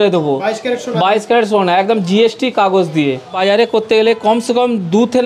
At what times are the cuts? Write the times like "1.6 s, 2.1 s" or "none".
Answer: 3.3 s